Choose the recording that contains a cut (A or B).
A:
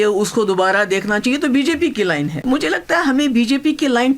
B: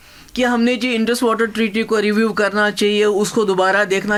A